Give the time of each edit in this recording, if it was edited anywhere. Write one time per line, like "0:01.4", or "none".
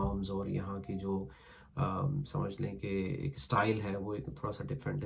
none